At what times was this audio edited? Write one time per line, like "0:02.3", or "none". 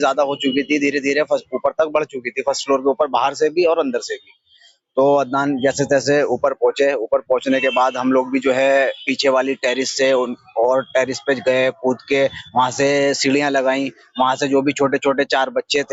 none